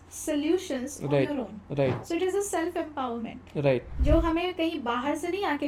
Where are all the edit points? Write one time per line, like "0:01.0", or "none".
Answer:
0:03.9